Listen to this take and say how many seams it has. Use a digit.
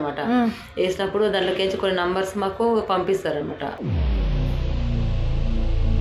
0